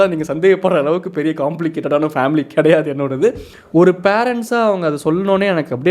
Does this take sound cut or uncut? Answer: cut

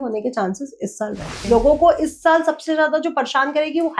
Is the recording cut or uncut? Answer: cut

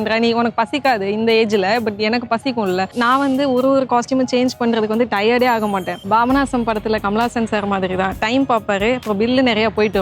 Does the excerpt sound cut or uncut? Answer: cut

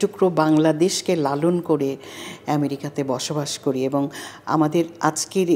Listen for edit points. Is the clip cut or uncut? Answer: uncut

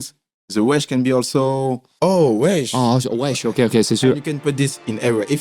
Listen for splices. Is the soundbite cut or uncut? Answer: cut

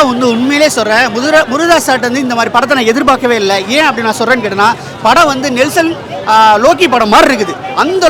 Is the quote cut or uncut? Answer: uncut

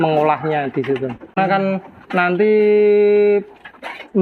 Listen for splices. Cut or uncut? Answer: cut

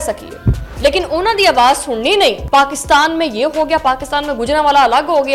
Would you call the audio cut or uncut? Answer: cut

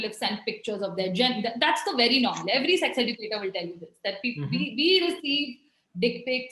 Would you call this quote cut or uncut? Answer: uncut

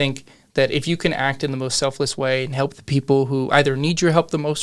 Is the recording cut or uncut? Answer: uncut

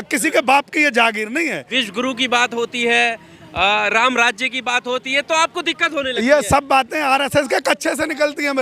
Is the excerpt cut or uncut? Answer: cut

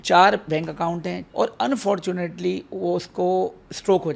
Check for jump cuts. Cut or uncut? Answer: cut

